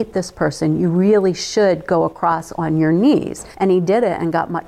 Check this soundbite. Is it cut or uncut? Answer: cut